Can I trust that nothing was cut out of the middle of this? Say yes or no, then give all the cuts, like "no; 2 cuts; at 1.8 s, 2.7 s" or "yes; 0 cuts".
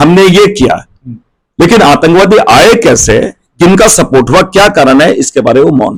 yes; 0 cuts